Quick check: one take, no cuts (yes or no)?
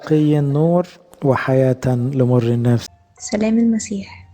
no